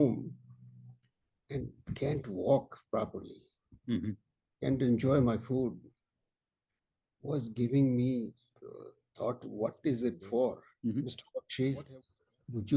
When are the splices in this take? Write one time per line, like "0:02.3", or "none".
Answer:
0:10.7

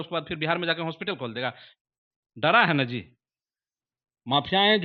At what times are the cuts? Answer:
0:01.7

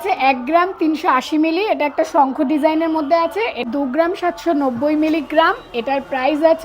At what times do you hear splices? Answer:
0:03.7

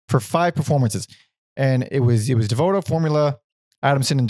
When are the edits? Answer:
none

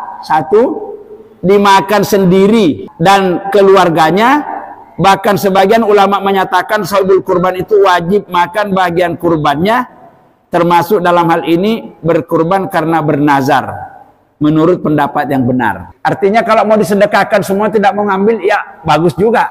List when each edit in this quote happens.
0:02.9
0:15.9

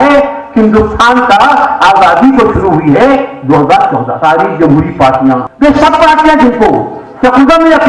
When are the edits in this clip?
0:04.1
0:05.5

